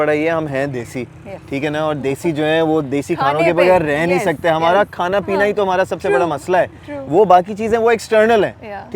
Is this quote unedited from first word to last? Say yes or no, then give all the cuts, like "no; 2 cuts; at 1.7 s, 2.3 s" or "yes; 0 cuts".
yes; 0 cuts